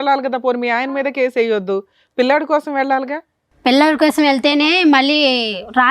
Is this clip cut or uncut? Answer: uncut